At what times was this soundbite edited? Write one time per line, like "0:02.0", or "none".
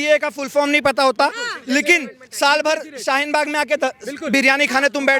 none

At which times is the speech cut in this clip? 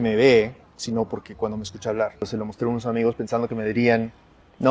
0:02.2

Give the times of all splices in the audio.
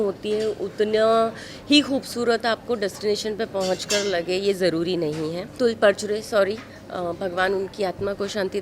0:05.5

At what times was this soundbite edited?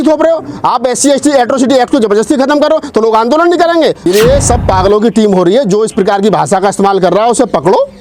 0:04.1

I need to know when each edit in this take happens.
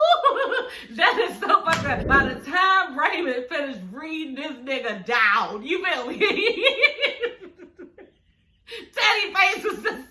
0:02.1

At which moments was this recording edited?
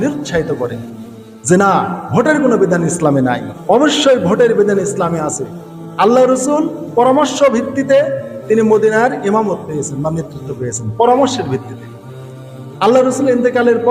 0:03.5

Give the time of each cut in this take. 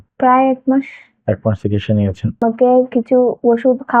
0:02.4

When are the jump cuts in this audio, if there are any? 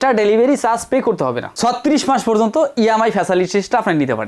0:01.5

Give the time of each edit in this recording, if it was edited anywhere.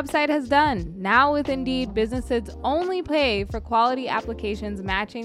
none

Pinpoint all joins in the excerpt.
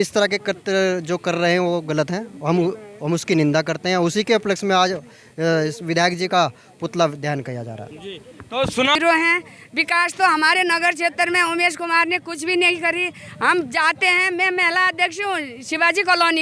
0:08.9

